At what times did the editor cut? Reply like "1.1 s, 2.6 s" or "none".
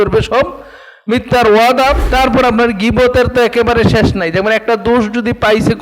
2.0 s